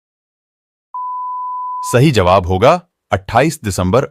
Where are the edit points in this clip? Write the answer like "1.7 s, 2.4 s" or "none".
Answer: 1.9 s